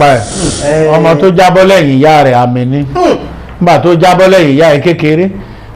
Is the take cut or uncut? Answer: cut